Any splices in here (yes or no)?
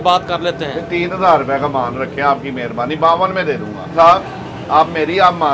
yes